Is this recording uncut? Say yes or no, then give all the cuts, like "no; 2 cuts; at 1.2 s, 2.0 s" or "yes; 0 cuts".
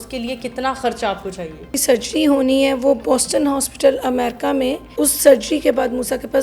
no; 2 cuts; at 1.8 s, 4.9 s